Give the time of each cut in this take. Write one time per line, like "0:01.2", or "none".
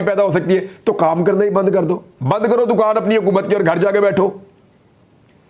none